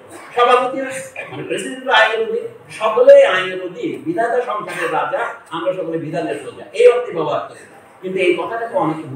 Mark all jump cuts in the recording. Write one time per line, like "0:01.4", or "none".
none